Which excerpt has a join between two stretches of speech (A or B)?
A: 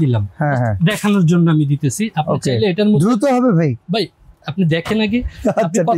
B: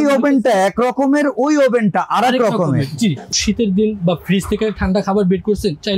B